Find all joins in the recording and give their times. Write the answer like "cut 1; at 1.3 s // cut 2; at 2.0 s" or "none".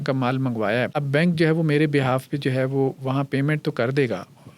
cut 1; at 1.0 s